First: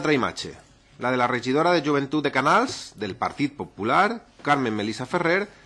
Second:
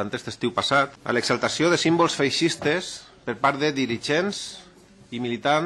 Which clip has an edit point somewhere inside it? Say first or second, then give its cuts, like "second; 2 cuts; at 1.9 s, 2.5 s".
second; 1 cut; at 1.0 s